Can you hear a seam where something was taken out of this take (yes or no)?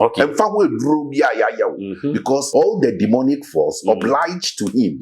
yes